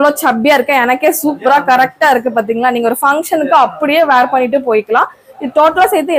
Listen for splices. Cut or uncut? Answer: uncut